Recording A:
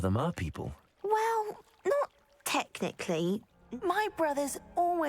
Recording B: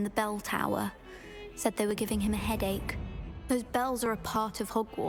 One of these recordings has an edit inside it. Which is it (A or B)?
A